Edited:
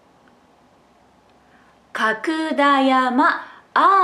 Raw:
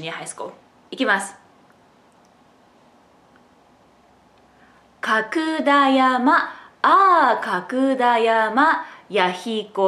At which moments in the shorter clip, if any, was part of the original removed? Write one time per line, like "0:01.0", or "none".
none